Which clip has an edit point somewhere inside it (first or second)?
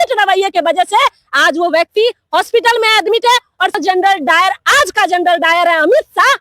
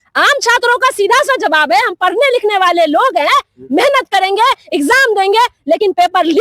first